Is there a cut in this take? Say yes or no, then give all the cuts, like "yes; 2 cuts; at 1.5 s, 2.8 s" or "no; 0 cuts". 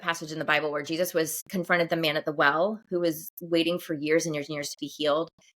yes; 1 cut; at 1.4 s